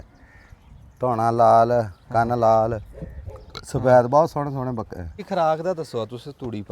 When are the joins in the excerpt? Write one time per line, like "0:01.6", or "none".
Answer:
0:05.2